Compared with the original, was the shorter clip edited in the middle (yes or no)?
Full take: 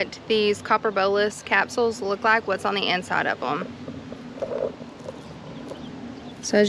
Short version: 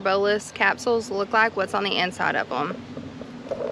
no